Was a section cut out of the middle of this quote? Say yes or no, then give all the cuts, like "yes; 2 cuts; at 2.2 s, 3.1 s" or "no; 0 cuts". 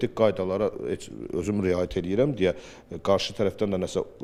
no; 0 cuts